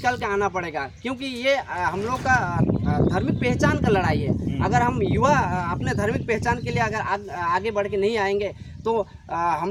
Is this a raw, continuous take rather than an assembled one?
yes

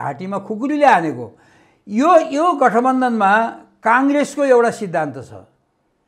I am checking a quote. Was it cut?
no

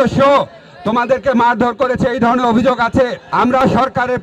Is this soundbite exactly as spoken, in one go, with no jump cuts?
no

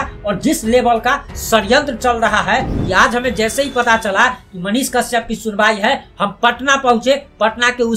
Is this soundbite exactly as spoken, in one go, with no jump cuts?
no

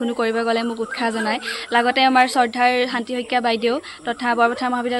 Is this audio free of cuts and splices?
yes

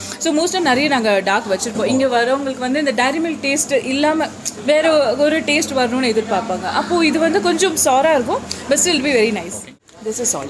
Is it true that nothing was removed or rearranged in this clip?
no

